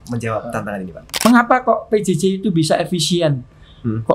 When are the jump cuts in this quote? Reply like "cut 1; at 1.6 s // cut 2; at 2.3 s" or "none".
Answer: cut 1; at 1.2 s